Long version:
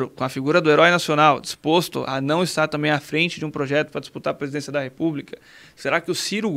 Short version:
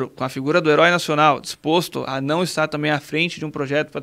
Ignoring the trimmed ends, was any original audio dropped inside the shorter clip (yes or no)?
no